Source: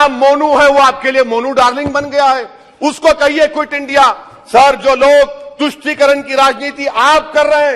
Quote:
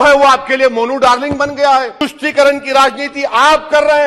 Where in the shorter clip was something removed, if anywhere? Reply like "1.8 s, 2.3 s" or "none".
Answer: 2.0 s